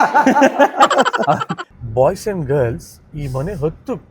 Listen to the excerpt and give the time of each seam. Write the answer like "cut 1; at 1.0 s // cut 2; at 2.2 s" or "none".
cut 1; at 1.7 s